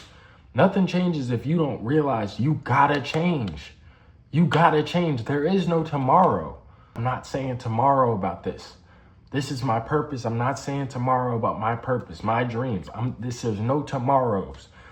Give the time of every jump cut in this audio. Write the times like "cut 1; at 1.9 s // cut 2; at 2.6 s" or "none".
cut 1; at 6.9 s